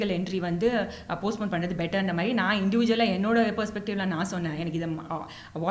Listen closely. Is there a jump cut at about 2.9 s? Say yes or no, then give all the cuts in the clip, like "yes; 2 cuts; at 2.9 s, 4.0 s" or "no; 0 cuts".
no; 0 cuts